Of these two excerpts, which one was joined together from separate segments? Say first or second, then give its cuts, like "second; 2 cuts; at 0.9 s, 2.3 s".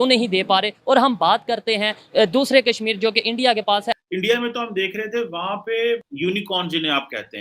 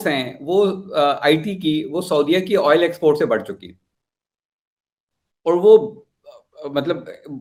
first; 2 cuts; at 4.0 s, 6.1 s